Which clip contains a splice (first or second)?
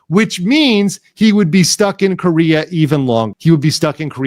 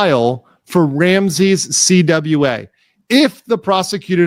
first